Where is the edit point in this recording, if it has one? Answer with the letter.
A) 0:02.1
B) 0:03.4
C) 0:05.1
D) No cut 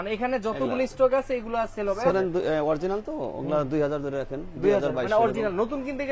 A